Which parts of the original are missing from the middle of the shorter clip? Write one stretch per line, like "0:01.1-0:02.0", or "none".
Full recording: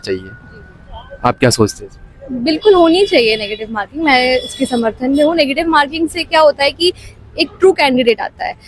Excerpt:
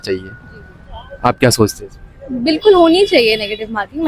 none